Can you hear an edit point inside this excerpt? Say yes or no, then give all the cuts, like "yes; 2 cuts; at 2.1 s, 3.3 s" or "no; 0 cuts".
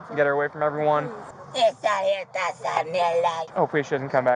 yes; 1 cut; at 3.4 s